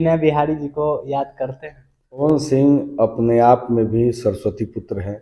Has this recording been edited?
yes; 1 cut; at 2.2 s

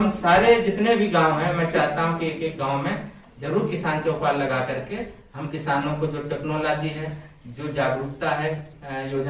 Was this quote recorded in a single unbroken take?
yes; 0 cuts

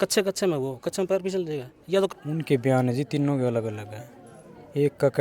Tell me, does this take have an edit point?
yes; 1 cut; at 2.1 s

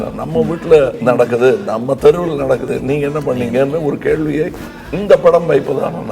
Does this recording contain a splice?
yes; 2 cuts; at 1.0 s, 2.6 s

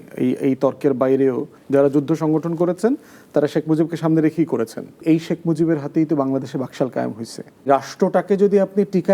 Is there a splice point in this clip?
yes; 3 cuts; at 1.5 s, 5.0 s, 7.7 s

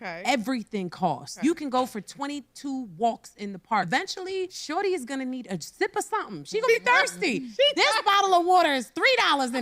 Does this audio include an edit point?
yes; 1 cut; at 4.1 s

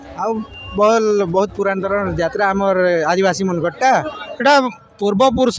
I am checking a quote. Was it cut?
yes; 1 cut; at 4.2 s

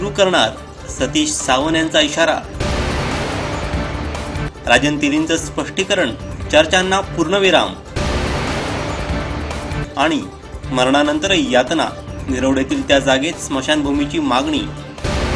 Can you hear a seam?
no; 0 cuts

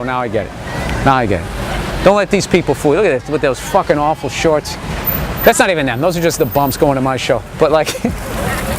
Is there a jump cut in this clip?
yes; 1 cut; at 2.3 s

